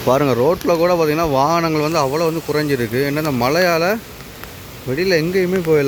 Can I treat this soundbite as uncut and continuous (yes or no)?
yes